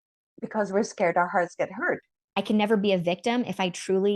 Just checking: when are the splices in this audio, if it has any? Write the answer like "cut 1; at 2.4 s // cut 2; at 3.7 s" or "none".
cut 1; at 2.0 s